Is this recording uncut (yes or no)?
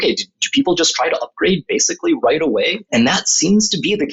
no